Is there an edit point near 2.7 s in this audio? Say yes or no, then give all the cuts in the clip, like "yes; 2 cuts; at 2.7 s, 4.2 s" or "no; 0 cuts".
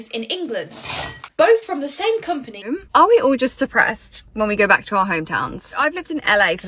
yes; 2 cuts; at 2.7 s, 5.8 s